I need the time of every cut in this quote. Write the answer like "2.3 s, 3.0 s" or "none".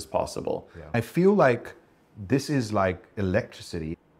0.9 s

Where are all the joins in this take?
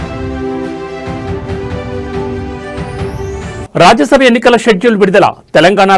3.6 s

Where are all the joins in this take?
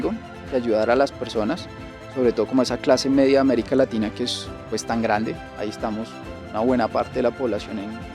none

